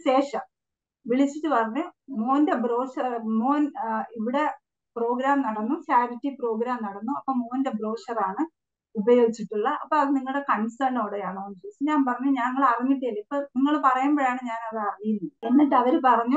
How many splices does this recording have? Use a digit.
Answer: 1